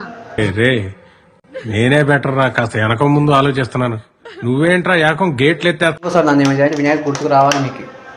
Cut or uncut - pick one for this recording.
cut